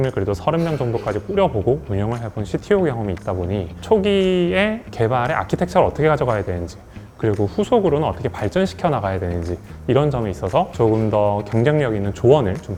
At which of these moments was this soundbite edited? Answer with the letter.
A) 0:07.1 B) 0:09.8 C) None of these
C